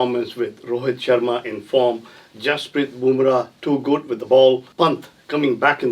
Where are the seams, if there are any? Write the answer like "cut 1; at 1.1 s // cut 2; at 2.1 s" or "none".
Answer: cut 1; at 4.7 s